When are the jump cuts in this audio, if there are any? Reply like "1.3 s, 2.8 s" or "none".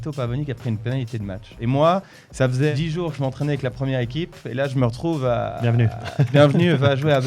1.5 s, 2.7 s